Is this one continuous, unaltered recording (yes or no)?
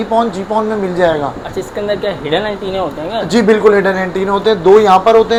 yes